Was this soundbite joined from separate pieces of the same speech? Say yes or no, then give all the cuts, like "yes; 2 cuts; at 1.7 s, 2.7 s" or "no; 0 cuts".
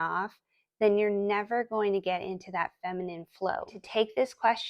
yes; 1 cut; at 3.8 s